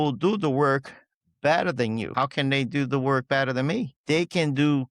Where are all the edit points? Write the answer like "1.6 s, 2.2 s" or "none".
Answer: 2.1 s, 4.0 s